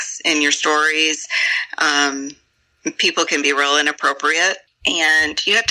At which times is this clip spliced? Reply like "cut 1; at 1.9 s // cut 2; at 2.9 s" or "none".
cut 1; at 4.7 s